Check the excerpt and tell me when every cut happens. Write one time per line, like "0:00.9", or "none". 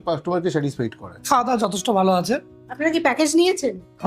0:01.1